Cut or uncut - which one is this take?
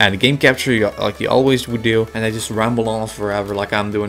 cut